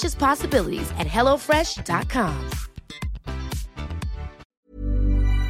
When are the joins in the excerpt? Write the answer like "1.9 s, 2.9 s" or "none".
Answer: 4.4 s